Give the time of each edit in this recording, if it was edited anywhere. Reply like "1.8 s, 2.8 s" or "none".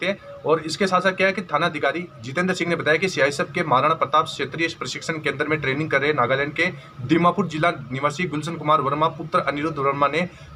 none

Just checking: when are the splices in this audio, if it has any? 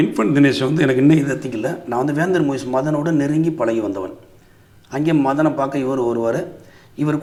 none

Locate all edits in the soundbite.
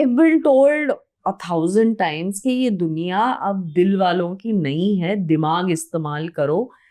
none

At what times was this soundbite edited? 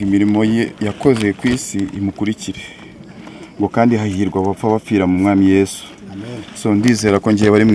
none

